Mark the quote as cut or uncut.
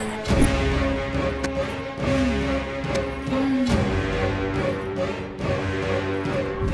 uncut